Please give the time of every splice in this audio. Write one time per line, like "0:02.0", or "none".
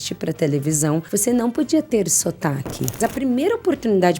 0:01.1
0:03.0